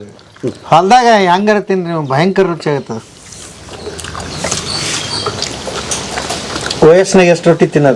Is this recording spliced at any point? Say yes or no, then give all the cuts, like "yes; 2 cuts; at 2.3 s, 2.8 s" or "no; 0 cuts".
yes; 1 cut; at 5.4 s